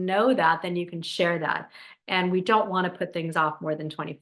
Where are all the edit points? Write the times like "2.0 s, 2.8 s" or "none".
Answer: none